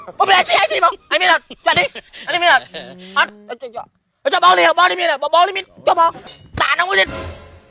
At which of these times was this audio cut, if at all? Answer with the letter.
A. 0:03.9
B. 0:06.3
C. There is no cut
B